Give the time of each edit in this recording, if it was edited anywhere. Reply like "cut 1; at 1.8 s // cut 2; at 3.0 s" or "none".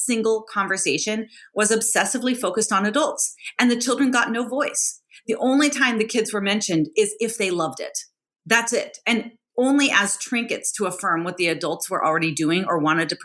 none